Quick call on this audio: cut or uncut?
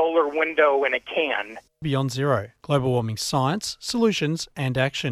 uncut